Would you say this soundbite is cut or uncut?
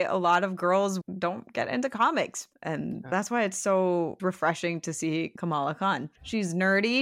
cut